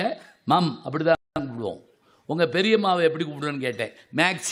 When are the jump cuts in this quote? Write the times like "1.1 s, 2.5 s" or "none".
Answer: none

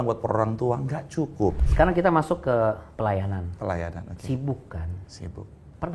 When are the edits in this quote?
1.6 s

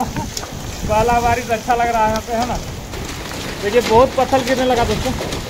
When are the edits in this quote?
2.5 s

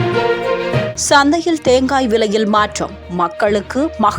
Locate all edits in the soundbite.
0.9 s

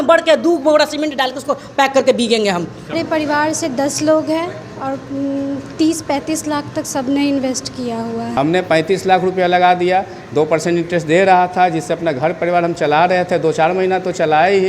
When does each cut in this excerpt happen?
2.9 s, 8.3 s

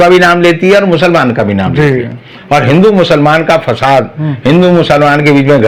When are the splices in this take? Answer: none

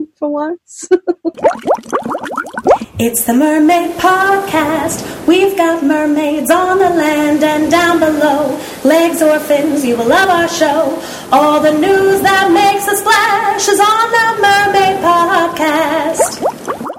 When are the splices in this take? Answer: 1.4 s

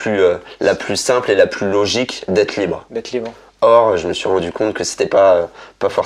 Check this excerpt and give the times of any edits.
none

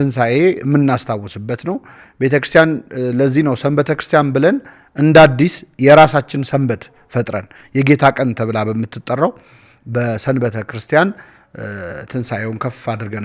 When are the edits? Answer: none

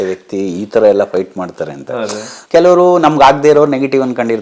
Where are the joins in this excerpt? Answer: 2.3 s

